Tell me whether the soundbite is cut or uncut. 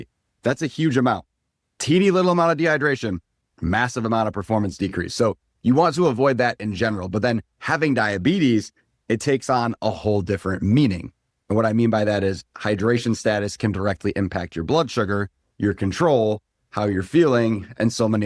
uncut